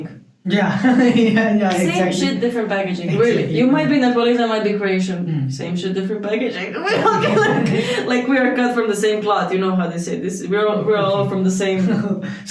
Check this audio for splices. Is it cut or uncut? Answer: uncut